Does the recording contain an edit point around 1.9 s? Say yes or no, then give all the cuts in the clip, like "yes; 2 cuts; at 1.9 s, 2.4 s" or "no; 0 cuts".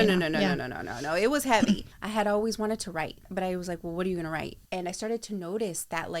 yes; 3 cuts; at 1.9 s, 3.2 s, 4.6 s